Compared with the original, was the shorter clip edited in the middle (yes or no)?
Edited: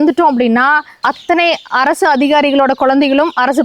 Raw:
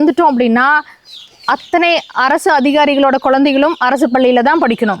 yes